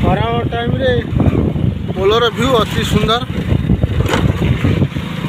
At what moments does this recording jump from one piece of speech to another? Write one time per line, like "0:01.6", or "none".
none

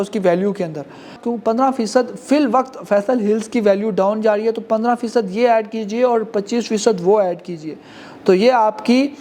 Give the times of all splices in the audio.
0:01.2

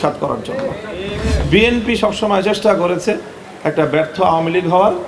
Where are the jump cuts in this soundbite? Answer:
0:01.5

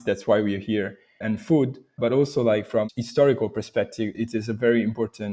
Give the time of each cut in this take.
0:02.9
0:04.2

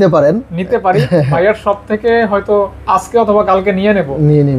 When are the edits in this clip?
none

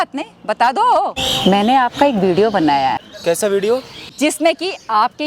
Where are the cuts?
0:01.2
0:03.1
0:04.1

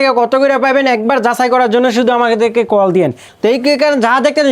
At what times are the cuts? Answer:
0:03.2

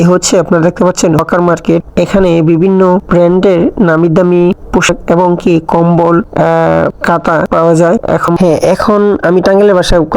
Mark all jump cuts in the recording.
0:08.4

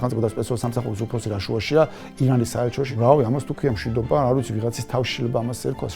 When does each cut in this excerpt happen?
0:02.9

